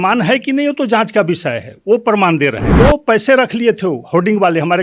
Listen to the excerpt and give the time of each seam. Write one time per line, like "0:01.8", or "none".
0:02.6